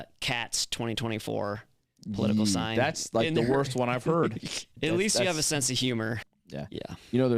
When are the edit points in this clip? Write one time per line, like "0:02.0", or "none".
0:04.7
0:06.3